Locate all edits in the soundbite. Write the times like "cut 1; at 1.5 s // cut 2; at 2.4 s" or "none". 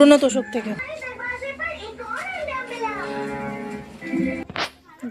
none